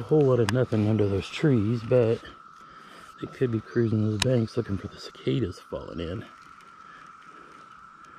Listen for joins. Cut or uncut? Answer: uncut